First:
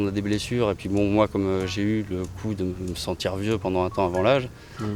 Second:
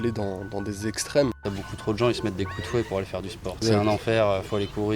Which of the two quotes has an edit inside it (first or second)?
second